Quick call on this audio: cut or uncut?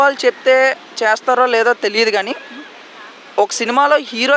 uncut